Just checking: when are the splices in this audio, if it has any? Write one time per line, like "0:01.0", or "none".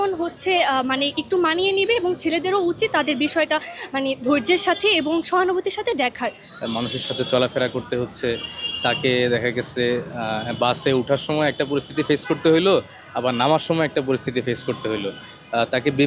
none